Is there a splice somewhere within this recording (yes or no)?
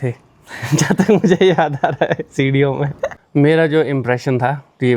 yes